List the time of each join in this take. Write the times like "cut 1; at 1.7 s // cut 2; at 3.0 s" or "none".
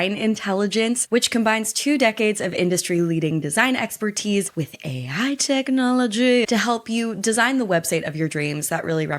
none